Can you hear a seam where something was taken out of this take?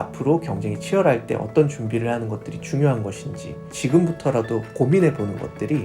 yes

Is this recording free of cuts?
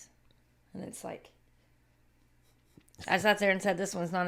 yes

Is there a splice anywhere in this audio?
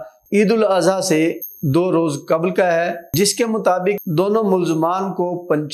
no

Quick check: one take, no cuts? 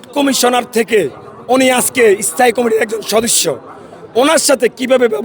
yes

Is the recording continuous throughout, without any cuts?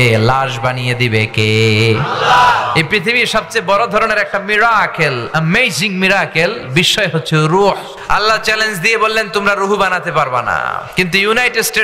no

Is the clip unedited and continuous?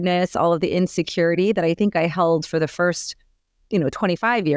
yes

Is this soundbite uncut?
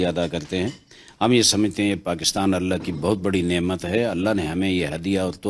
yes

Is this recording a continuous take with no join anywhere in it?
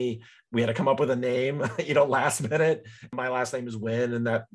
no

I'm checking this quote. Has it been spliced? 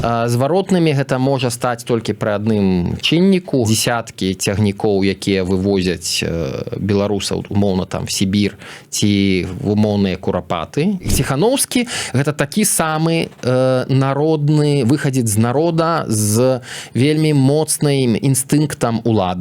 yes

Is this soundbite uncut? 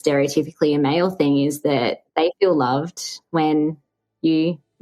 yes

